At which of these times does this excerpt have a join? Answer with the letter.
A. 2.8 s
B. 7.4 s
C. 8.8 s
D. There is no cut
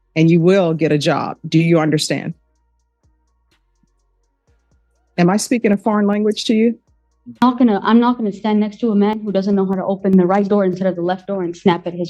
B